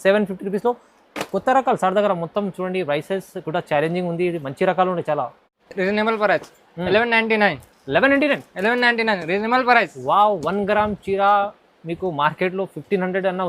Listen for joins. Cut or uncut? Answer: cut